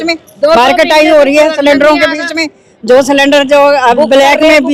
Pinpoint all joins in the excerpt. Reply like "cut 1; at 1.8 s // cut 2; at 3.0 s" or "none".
none